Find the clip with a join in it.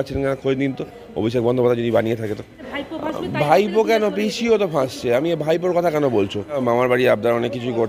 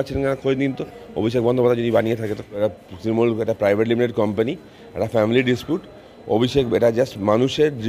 first; 2 cuts; at 2.5 s, 6.7 s

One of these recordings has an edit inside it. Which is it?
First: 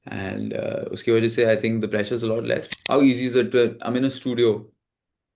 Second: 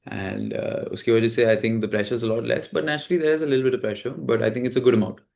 first; 1 cut; at 2.7 s

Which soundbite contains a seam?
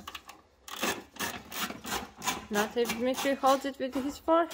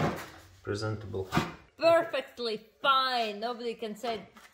second; 1 cut; at 1.6 s

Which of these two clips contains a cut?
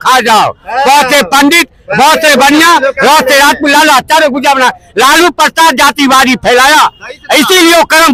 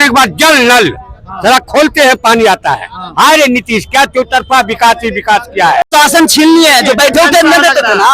second; 1 cut; at 5.9 s

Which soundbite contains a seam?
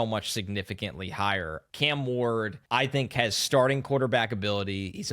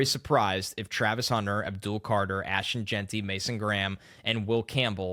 first; 2 cuts; at 1.6 s, 2.6 s

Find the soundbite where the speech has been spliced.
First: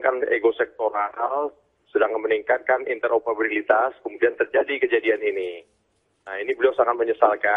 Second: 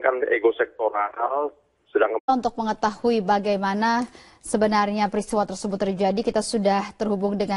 first; 1 cut; at 2.2 s

